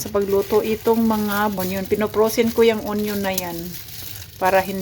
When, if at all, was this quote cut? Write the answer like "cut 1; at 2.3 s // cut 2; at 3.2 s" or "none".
cut 1; at 1.5 s